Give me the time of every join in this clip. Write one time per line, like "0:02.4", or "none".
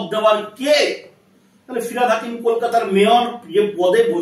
none